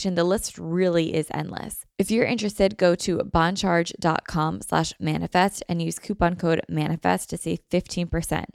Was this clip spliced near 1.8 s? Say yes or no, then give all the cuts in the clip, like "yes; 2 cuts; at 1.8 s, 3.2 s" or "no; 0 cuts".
yes; 1 cut; at 1.8 s